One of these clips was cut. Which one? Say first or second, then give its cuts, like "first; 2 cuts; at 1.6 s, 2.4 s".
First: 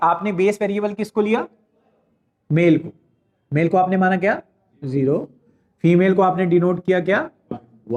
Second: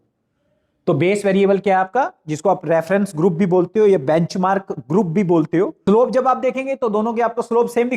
second; 1 cut; at 5.8 s